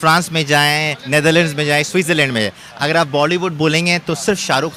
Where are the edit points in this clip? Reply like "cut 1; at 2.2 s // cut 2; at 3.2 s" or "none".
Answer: none